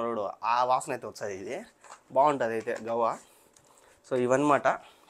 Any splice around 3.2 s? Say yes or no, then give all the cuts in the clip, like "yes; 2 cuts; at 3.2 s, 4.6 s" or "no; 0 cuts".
no; 0 cuts